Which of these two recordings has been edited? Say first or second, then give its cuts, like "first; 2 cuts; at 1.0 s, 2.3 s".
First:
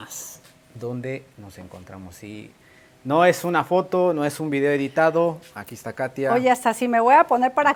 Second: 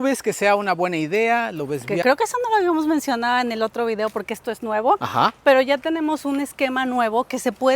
second; 1 cut; at 1.9 s